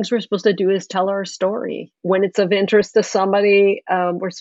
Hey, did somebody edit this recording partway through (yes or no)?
yes